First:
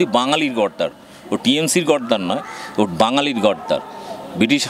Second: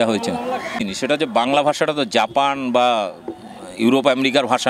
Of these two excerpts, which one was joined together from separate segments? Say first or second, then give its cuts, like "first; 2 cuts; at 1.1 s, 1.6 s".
second; 1 cut; at 1.0 s